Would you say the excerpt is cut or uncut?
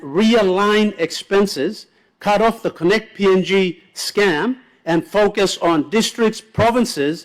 uncut